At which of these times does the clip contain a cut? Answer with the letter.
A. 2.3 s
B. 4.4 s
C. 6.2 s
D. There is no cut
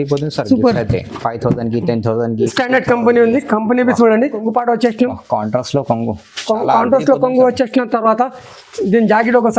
B